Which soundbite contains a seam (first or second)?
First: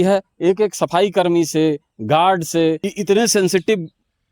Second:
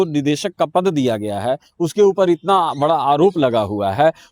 first